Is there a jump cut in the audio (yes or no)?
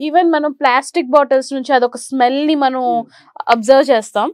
no